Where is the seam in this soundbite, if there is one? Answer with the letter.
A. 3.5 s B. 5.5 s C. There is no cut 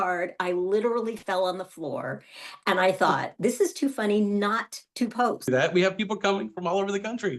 B